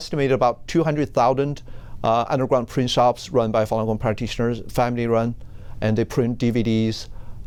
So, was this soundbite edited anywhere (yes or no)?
no